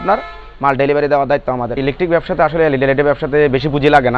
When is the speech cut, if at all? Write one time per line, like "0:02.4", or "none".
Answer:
0:01.8